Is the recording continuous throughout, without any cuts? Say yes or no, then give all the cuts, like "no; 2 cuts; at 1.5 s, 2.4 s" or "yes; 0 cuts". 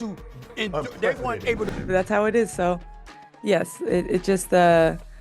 no; 1 cut; at 1.8 s